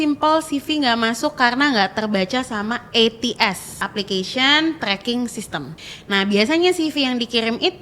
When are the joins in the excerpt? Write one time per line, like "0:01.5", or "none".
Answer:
0:03.8
0:05.8